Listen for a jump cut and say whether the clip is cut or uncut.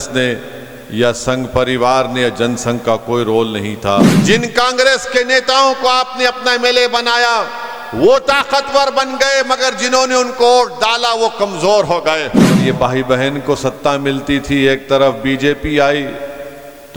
cut